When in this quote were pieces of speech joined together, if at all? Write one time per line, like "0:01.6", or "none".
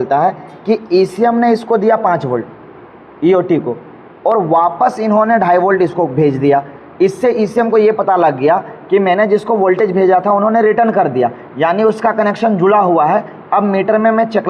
none